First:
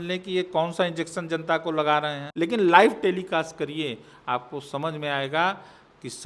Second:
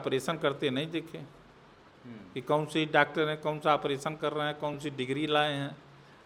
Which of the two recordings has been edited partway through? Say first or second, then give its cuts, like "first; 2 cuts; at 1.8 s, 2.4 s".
first; 1 cut; at 2.2 s